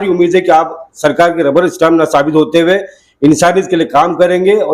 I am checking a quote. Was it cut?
no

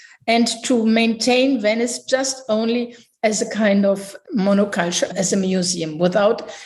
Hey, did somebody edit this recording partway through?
no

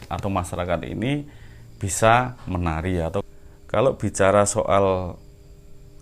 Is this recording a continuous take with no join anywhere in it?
no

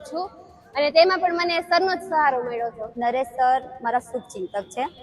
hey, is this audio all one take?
no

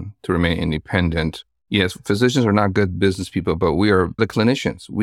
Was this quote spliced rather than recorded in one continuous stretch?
yes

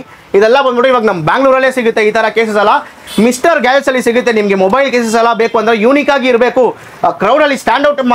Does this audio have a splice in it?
no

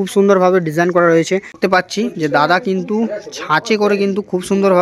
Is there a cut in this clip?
yes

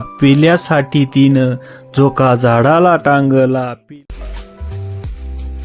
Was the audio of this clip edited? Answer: yes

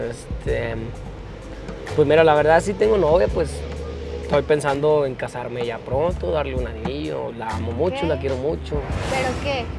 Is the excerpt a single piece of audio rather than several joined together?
yes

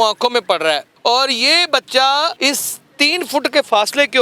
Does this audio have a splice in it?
yes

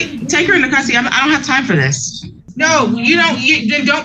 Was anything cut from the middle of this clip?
yes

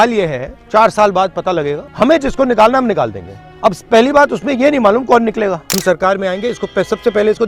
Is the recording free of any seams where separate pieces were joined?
no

